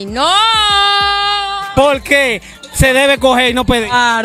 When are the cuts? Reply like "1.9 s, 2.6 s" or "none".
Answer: 1.7 s